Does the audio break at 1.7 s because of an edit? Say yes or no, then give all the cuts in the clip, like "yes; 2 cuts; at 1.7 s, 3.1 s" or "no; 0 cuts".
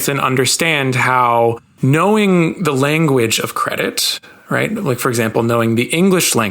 yes; 1 cut; at 1.7 s